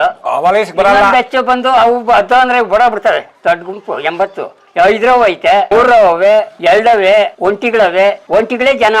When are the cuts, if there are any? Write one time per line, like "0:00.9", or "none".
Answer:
0:05.7
0:06.5
0:07.3
0:08.2